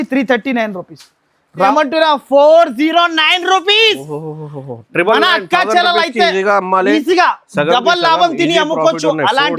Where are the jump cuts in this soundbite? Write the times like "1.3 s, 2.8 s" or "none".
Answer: 1.7 s